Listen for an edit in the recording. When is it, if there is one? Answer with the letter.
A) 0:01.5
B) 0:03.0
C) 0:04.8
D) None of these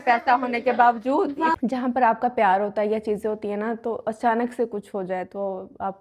A